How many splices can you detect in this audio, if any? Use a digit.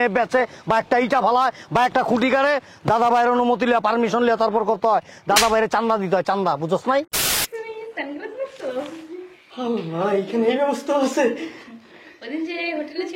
1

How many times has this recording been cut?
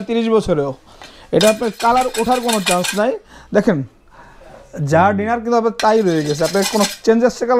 0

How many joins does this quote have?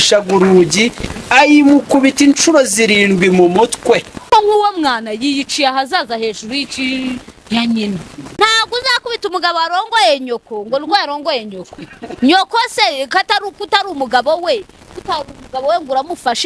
2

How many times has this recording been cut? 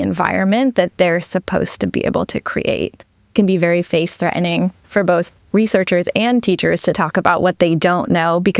1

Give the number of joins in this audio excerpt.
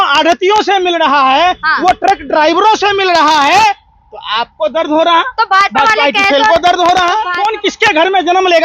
1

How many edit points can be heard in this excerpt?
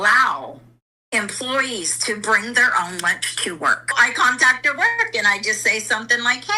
1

